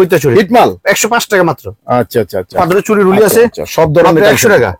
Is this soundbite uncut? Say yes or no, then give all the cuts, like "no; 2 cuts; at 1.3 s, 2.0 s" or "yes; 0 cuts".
no; 1 cut; at 2.6 s